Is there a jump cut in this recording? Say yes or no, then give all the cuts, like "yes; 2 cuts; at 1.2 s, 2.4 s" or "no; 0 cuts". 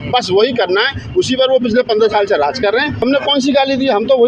yes; 1 cut; at 3.0 s